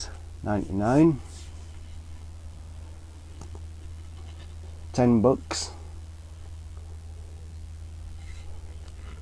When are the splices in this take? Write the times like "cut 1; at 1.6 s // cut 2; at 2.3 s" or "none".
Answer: cut 1; at 2.8 s